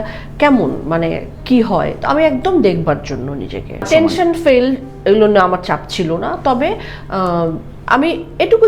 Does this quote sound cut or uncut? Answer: uncut